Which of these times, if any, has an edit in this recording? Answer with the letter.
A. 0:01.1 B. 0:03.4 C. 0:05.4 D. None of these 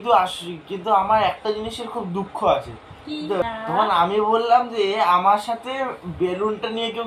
B